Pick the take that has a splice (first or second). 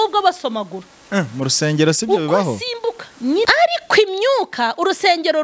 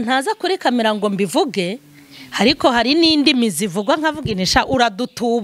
first